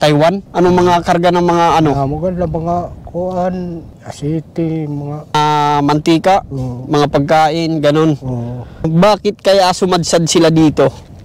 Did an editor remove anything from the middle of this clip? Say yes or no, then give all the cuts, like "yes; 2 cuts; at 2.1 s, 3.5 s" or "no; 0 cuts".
no; 0 cuts